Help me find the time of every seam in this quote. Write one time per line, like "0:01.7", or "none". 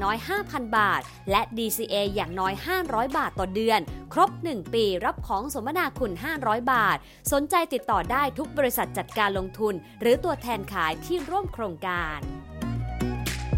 0:12.1

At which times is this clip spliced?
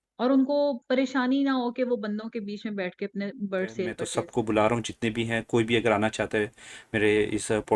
0:04.0

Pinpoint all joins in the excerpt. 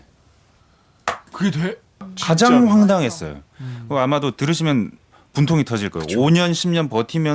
0:02.1

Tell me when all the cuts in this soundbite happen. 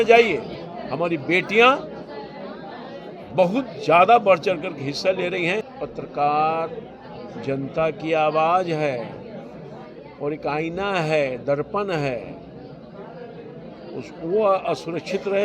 0:05.8

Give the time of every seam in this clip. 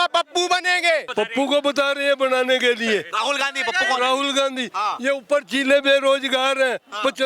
0:01.1

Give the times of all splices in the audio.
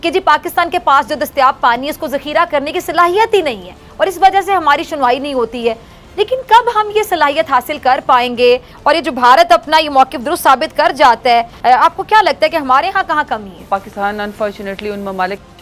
none

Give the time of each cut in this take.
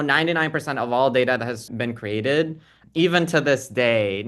0:01.7

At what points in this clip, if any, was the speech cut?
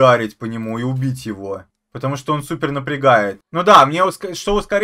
none

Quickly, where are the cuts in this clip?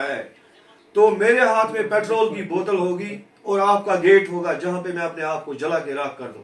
none

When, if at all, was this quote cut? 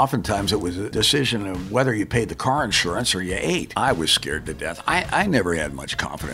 0:00.9
0:03.7

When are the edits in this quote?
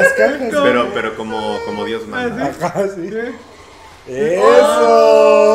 none

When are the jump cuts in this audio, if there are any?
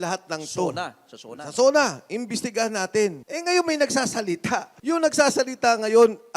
0:03.3
0:04.7

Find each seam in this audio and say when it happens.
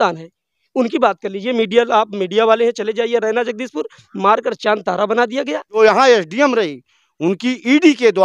0:05.8

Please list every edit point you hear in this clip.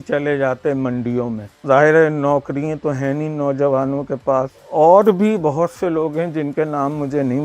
0:01.5
0:04.6

